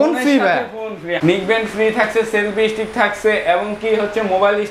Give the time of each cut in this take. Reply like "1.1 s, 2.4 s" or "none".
1.2 s